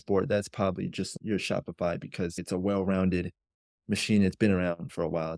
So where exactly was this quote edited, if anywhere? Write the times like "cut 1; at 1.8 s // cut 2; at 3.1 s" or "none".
cut 1; at 1.1 s

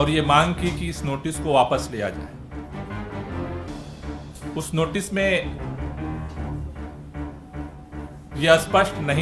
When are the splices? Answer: cut 1; at 2.8 s // cut 2; at 4.5 s // cut 3; at 5.4 s // cut 4; at 8.3 s

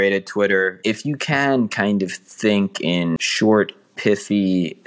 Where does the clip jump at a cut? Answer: cut 1; at 0.8 s // cut 2; at 3.3 s

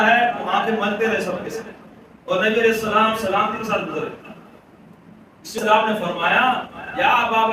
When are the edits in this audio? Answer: cut 1; at 5.6 s

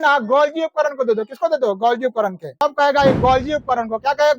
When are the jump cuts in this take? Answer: cut 1; at 2.5 s

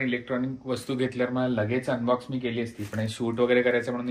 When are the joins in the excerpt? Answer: none

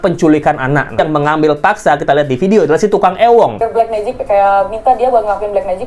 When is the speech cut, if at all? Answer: cut 1; at 1.0 s // cut 2; at 3.6 s

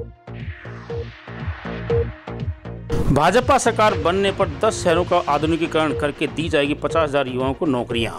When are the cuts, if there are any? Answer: cut 1; at 3.0 s

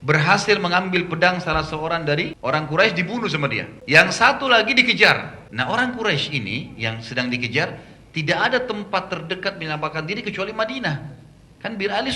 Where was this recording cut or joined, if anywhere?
cut 1; at 2.3 s // cut 2; at 3.7 s // cut 3; at 5.4 s

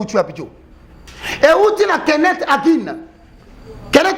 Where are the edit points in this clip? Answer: none

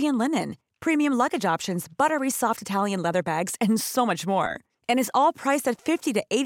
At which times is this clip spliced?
none

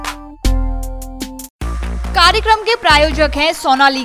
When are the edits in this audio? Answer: none

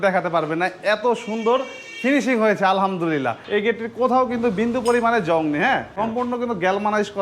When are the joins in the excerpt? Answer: cut 1; at 3.4 s // cut 2; at 5.9 s

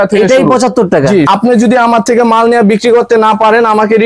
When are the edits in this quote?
cut 1; at 1.3 s

